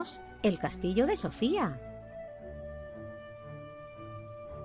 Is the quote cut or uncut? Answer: cut